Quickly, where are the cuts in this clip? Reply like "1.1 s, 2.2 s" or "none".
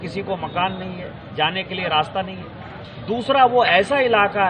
none